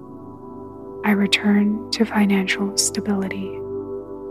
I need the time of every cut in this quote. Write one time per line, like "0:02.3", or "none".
0:01.0
0:03.4